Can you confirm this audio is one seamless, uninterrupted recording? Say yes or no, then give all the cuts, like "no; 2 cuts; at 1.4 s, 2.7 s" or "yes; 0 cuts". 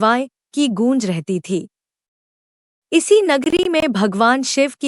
yes; 0 cuts